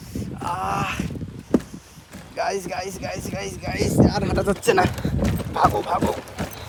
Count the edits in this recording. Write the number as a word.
zero